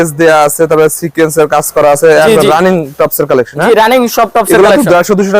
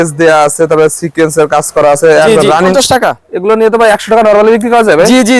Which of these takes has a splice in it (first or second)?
second